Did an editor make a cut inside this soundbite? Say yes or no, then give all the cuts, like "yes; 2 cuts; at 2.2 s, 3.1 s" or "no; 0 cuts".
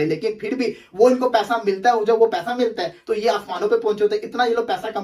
no; 0 cuts